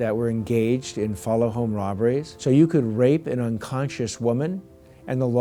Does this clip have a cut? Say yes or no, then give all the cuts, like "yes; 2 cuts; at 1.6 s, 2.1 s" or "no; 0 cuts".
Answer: yes; 1 cut; at 2.3 s